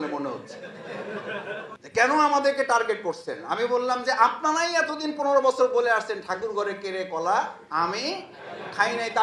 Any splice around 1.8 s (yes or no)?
yes